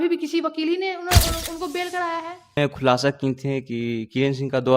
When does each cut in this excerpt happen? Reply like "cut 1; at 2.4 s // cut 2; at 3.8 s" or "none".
cut 1; at 2.6 s